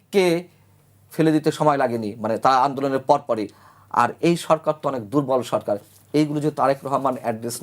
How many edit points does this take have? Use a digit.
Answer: 0